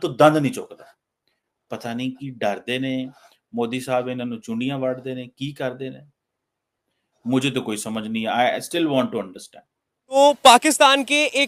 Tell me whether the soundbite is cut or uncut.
cut